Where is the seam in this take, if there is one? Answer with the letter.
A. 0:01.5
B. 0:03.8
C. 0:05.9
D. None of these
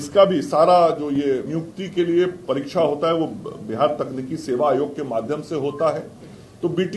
A